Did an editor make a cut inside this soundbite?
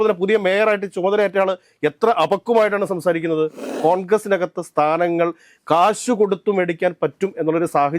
yes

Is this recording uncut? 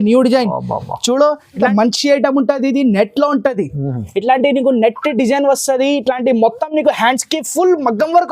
no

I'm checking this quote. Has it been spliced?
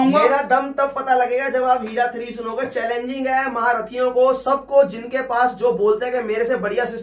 no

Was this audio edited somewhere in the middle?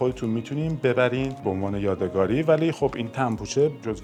no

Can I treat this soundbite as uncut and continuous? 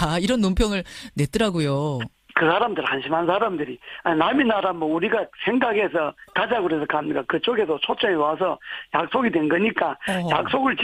yes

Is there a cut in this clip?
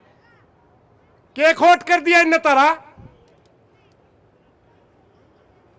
no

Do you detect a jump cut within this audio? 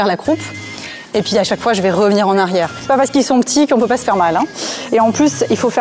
yes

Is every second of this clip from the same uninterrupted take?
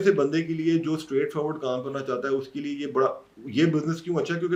yes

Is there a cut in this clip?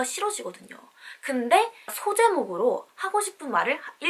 no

